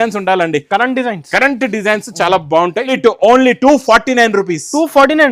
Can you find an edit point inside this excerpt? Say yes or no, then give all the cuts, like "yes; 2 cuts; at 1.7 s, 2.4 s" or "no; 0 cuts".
yes; 1 cut; at 2.9 s